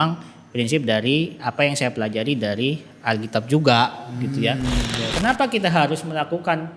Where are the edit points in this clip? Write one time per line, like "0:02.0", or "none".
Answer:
0:05.1